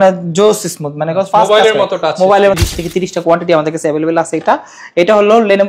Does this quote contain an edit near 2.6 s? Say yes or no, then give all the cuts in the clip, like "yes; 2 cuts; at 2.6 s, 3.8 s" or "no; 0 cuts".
yes; 1 cut; at 2.6 s